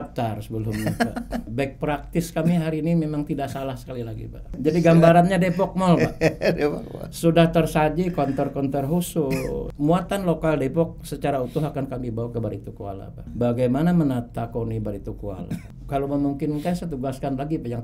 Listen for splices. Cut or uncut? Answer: cut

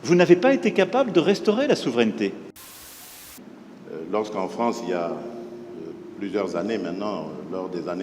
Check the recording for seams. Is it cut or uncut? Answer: cut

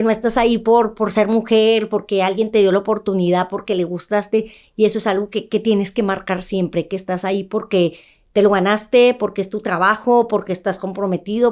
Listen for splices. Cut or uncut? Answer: uncut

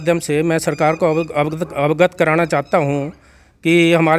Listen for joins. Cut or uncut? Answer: uncut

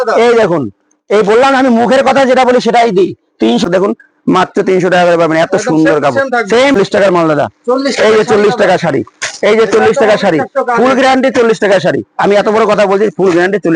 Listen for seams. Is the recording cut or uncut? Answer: cut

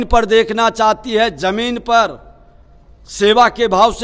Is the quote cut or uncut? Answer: uncut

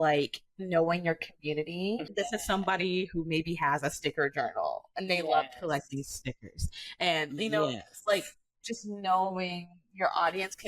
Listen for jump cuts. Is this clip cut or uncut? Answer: cut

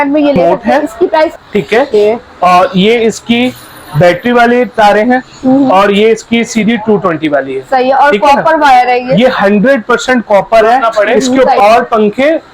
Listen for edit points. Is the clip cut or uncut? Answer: cut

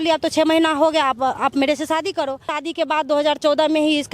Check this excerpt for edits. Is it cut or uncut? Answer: cut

